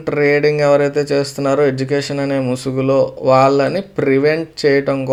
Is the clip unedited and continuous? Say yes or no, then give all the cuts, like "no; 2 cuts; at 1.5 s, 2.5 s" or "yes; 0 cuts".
yes; 0 cuts